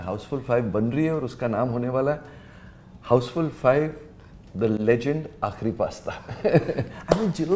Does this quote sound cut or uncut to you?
uncut